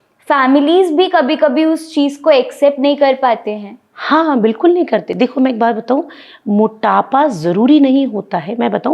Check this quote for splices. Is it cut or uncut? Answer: uncut